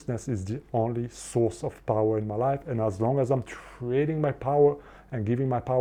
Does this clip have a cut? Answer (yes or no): no